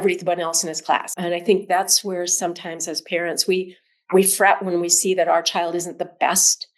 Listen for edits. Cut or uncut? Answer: cut